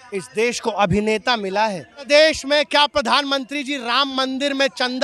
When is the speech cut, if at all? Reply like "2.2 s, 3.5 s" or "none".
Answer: 2.1 s